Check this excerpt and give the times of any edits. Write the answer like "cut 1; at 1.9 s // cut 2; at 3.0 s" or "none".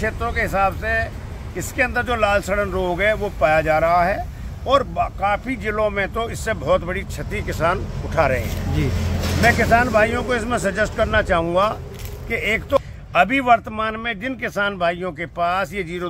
cut 1; at 12.8 s